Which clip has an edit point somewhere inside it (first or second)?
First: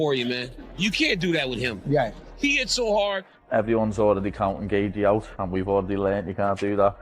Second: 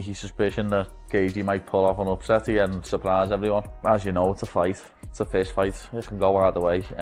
first